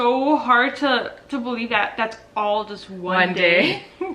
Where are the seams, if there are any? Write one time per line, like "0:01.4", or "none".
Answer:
none